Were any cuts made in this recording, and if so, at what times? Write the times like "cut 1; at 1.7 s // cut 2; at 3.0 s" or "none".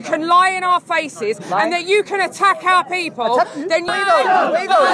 cut 1; at 3.9 s